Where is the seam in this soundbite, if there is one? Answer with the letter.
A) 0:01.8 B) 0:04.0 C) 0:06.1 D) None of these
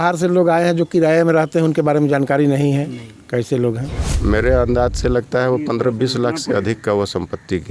B